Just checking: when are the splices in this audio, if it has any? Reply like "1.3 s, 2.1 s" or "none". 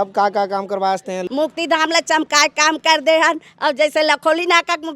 1.3 s